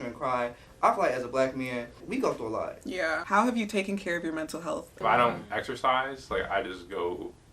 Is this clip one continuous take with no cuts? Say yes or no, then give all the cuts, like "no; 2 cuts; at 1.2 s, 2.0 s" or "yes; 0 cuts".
no; 3 cuts; at 2.0 s, 3.2 s, 5.0 s